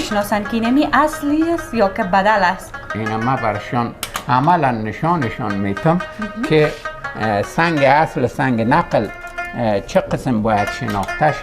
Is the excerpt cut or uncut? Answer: cut